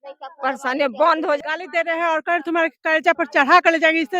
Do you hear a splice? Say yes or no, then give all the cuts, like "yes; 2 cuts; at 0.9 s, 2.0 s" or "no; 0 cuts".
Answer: yes; 1 cut; at 1.4 s